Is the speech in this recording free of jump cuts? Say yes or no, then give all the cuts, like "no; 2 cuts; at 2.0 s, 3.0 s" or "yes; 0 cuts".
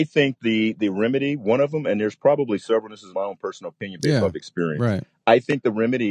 yes; 0 cuts